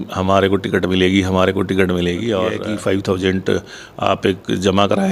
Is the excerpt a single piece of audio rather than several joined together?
no; 1 cut; at 2.6 s

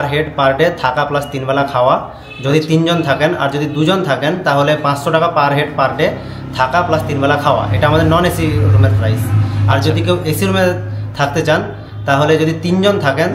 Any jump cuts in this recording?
no; 0 cuts

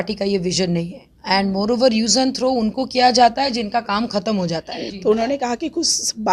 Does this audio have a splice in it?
yes; 1 cut; at 4.8 s

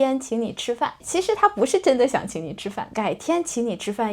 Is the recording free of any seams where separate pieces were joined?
no; 2 cuts; at 1.0 s, 2.8 s

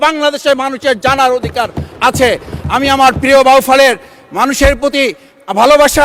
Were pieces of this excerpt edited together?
no; 0 cuts

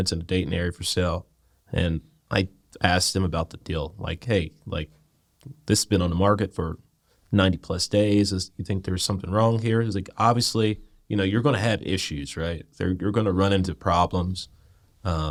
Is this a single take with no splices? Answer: yes; 0 cuts

